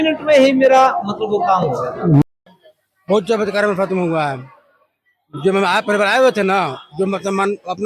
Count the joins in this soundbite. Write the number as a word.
one